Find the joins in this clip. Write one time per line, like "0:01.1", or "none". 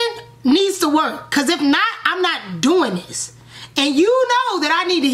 none